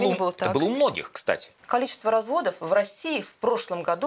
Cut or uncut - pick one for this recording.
cut